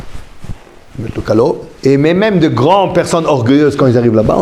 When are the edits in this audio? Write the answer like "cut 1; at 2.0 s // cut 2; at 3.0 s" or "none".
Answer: cut 1; at 1.7 s